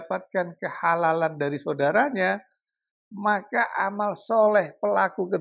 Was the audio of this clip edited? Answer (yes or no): no